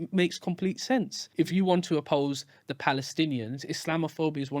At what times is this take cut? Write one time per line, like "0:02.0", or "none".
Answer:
0:01.2
0:02.0